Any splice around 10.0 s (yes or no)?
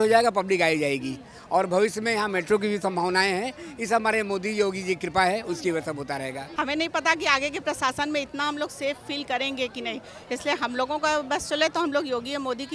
no